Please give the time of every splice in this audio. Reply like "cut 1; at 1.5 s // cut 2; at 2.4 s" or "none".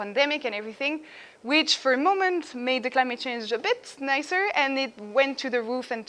none